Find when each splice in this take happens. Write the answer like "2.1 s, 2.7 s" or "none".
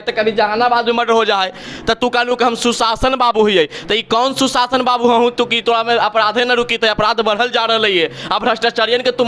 none